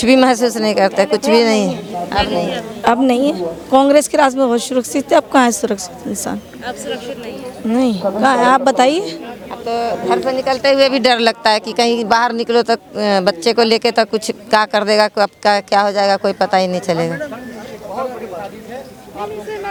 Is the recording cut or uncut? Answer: uncut